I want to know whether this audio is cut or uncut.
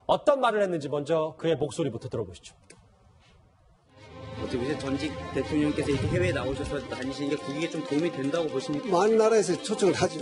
cut